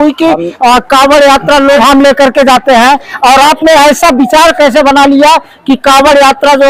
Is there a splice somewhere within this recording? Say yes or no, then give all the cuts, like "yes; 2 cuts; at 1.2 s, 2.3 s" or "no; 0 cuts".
yes; 1 cut; at 1.8 s